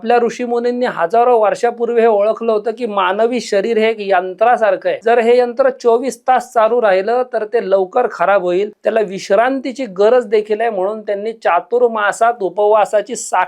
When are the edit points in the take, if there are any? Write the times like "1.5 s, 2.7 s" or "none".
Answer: 4.9 s, 8.7 s